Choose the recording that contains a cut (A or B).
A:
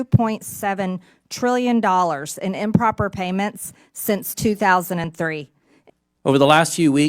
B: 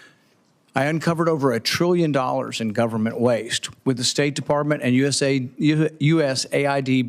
A